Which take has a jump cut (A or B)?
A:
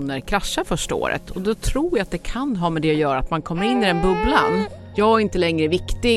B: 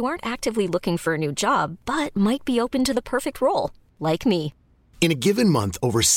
A